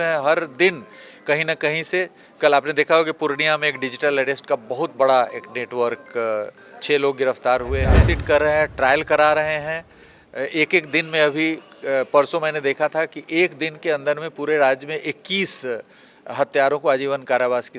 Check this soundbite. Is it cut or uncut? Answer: cut